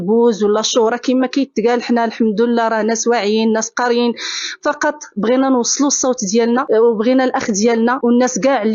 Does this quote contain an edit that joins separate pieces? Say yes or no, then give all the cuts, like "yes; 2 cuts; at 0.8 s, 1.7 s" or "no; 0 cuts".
no; 0 cuts